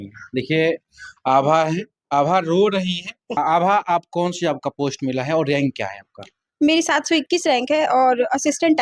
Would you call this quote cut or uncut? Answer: cut